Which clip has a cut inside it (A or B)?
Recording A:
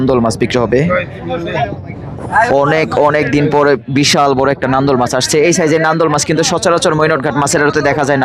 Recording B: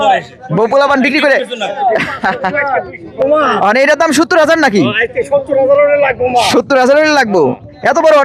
B